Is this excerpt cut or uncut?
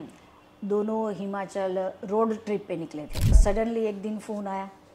cut